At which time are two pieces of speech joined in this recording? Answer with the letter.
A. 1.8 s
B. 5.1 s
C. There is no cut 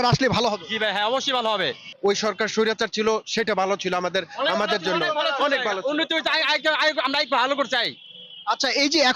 A